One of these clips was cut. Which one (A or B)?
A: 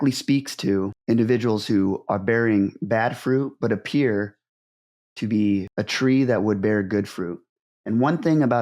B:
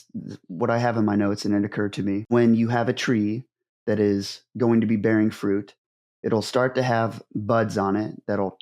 A